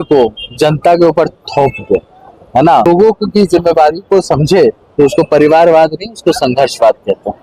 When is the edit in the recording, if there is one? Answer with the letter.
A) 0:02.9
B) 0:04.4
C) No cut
A